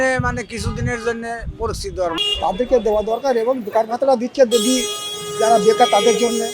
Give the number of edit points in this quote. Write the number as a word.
one